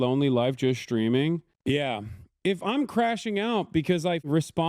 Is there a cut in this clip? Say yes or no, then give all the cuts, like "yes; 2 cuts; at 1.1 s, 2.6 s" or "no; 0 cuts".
yes; 1 cut; at 1.5 s